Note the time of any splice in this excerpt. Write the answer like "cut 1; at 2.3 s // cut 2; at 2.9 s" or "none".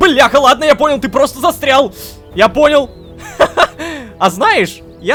none